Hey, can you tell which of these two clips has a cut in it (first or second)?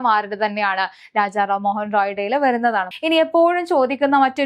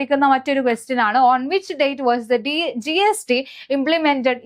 first